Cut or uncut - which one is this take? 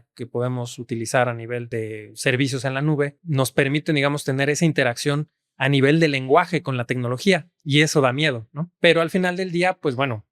cut